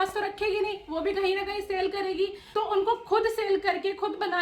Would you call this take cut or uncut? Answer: cut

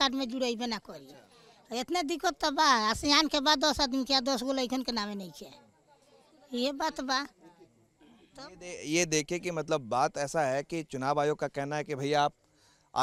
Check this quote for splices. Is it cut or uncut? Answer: uncut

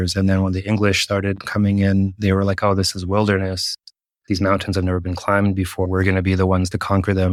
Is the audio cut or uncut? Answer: uncut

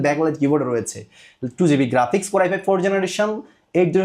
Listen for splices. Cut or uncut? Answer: uncut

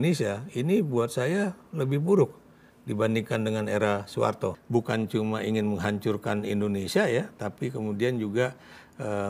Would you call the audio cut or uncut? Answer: cut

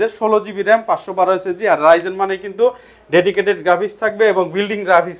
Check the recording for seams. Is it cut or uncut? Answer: uncut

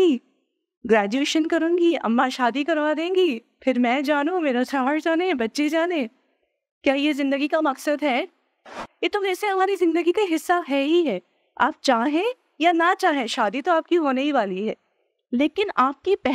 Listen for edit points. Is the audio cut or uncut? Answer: cut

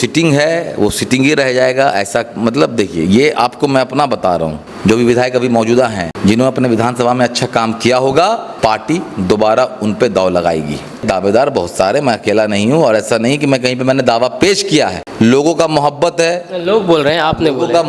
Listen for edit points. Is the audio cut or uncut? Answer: cut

